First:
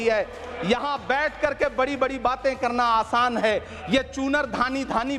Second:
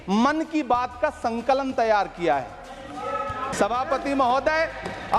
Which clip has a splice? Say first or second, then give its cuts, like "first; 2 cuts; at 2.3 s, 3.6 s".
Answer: second; 1 cut; at 3.5 s